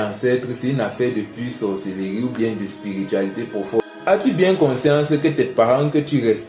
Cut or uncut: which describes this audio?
cut